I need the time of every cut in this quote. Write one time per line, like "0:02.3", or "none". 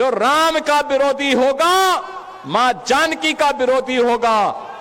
0:01.8